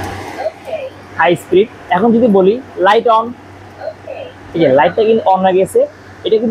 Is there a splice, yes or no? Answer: no